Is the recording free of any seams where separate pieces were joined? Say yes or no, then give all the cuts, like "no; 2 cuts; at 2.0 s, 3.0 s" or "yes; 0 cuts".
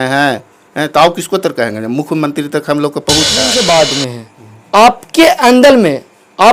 no; 1 cut; at 3.5 s